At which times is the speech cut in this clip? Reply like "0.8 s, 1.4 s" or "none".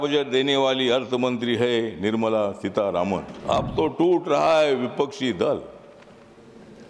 3.3 s